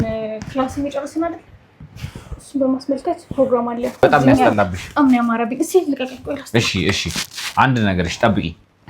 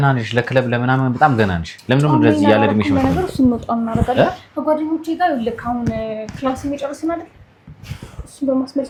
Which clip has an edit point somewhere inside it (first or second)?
first